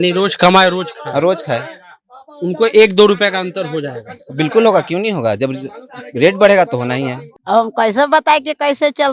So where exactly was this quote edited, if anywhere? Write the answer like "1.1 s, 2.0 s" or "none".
7.3 s